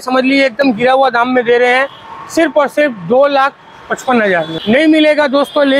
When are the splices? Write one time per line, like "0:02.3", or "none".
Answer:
0:04.5